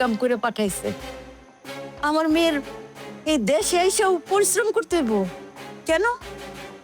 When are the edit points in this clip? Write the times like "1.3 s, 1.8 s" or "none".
none